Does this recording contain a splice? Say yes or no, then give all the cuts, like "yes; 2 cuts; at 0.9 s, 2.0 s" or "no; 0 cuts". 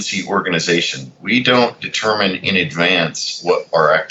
no; 0 cuts